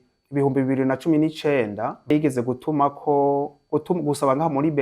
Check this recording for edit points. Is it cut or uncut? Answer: cut